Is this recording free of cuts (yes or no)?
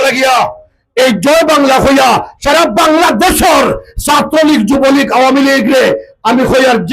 yes